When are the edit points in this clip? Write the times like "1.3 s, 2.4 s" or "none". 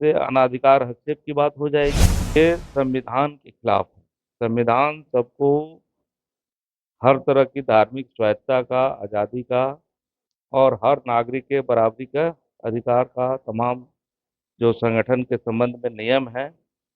2.4 s

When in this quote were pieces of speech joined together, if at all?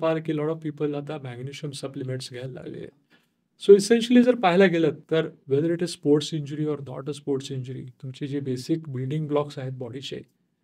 none

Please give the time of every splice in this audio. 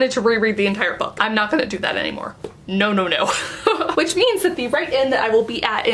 none

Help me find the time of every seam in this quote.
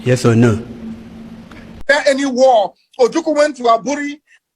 1.9 s

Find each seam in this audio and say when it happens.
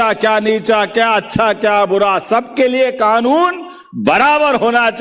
none

